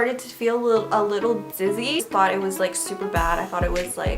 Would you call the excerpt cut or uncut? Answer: cut